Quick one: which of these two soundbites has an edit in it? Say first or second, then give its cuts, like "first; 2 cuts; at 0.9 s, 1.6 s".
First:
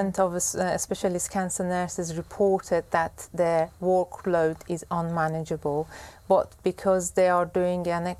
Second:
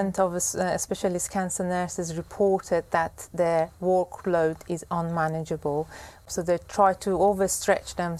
second; 1 cut; at 6.3 s